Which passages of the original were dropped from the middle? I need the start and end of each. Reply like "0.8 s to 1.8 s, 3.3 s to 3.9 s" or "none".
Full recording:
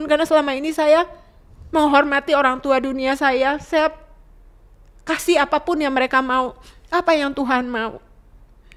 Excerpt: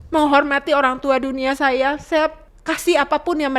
4.1 s to 4.9 s